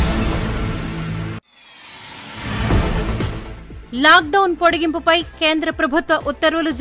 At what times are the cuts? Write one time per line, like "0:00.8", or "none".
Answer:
0:01.0
0:03.1